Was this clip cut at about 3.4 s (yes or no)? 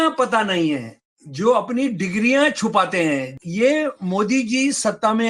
yes